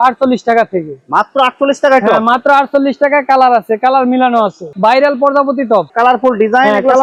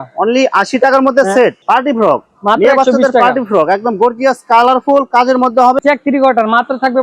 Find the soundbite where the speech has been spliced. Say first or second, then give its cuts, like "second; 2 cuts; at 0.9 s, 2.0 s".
second; 2 cuts; at 1.6 s, 5.8 s